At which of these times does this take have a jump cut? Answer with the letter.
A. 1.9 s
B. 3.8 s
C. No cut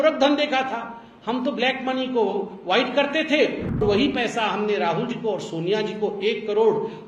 B